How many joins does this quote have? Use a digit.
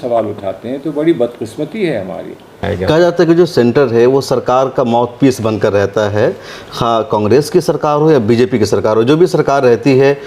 1